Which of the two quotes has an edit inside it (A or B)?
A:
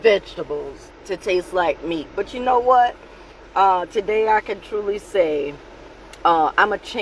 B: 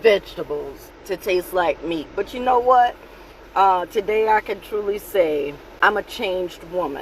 B